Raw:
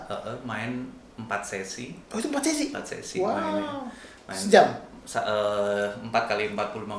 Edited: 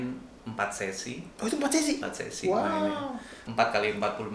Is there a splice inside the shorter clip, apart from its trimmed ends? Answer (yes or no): yes